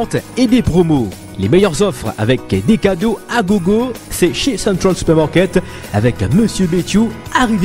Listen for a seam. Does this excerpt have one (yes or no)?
no